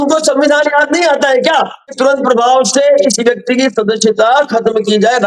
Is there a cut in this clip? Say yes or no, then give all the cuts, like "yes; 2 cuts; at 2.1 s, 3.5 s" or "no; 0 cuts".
yes; 1 cut; at 1.8 s